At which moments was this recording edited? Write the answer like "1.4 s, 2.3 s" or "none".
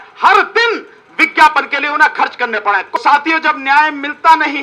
3.0 s